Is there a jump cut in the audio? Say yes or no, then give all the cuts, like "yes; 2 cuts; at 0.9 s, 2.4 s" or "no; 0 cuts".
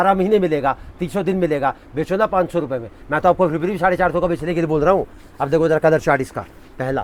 no; 0 cuts